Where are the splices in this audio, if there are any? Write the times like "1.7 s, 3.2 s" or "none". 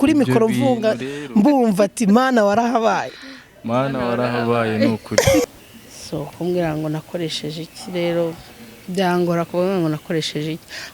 5.4 s